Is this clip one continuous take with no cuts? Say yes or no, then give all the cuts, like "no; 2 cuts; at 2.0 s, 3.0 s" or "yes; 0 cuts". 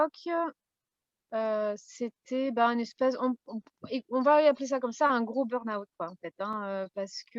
yes; 0 cuts